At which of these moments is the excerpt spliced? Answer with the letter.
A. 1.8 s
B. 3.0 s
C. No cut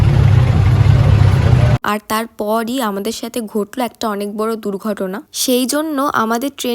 A